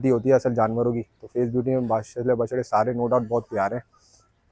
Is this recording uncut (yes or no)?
yes